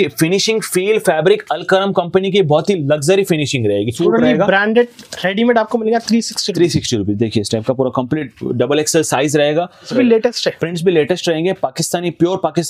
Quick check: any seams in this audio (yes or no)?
yes